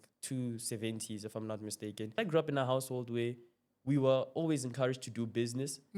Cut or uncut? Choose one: cut